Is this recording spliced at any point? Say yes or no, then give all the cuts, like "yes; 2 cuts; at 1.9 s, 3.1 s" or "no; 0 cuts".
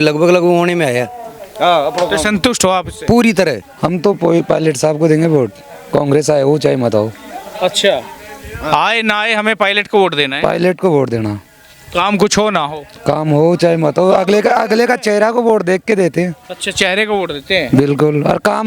yes; 1 cut; at 3.7 s